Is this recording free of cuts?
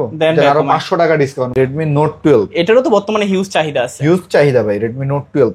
no; 1 cut; at 1.5 s

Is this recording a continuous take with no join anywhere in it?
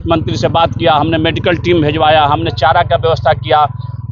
yes; 0 cuts

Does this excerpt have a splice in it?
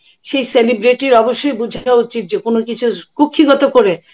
no; 0 cuts

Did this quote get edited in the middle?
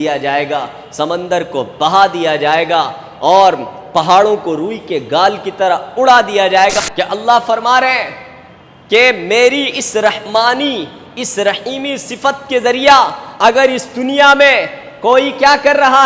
yes; 1 cut; at 6.8 s

